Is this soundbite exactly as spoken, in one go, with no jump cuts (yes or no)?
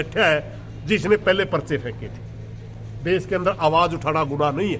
yes